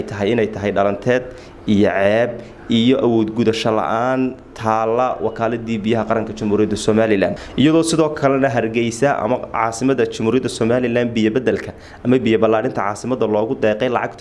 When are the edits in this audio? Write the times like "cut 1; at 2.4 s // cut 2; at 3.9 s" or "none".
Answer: cut 1; at 7.4 s